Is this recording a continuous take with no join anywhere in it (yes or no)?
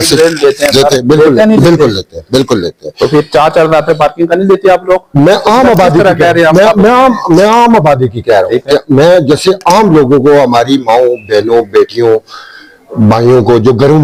yes